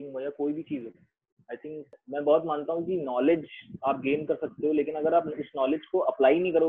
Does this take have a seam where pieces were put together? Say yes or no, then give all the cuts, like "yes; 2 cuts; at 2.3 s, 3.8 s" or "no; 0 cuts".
yes; 1 cut; at 1.9 s